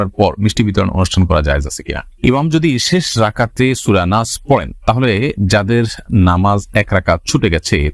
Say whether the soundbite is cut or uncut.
cut